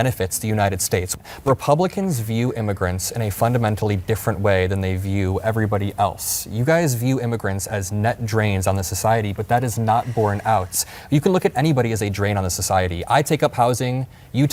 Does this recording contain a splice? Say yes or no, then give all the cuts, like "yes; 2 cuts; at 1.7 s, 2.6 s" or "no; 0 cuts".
no; 0 cuts